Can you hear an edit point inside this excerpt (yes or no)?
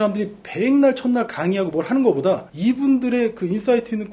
no